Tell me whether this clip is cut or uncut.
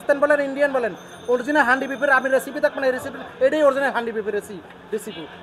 uncut